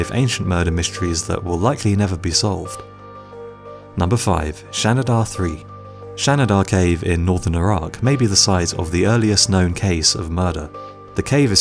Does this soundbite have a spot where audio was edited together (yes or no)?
yes